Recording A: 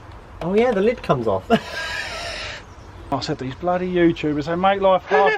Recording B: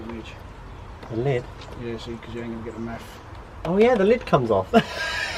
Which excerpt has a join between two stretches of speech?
A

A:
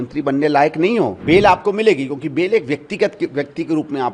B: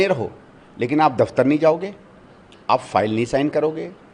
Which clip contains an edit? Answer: A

